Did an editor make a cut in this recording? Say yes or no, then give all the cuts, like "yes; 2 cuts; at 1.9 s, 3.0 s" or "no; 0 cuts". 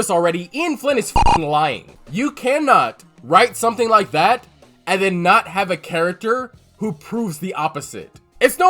yes; 1 cut; at 1.9 s